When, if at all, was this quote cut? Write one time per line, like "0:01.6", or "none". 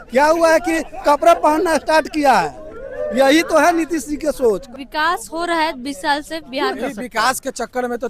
0:04.6
0:06.8